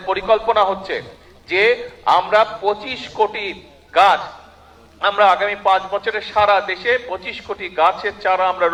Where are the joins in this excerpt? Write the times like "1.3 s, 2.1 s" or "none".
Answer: none

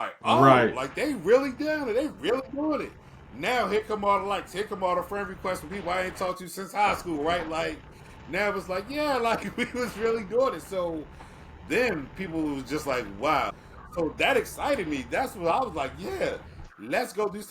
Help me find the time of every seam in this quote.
13.6 s

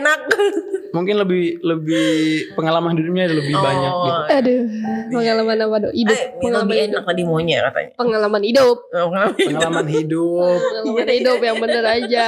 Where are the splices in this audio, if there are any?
none

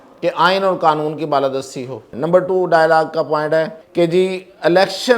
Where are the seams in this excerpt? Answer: 2.0 s, 3.8 s

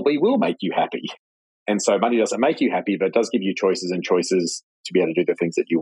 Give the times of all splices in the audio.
none

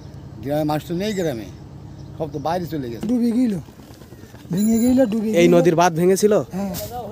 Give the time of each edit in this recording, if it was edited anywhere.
3.1 s

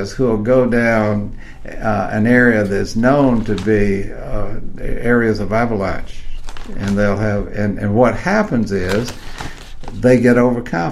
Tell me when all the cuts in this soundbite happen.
none

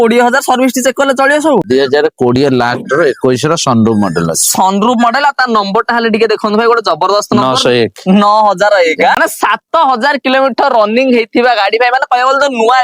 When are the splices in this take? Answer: 1.6 s, 9.2 s

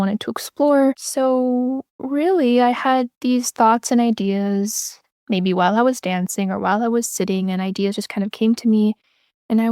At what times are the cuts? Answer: 1.0 s

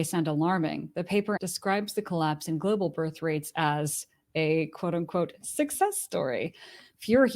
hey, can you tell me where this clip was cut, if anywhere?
1.4 s

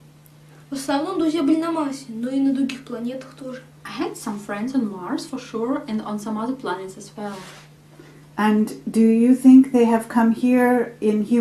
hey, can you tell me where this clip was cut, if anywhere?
2.6 s

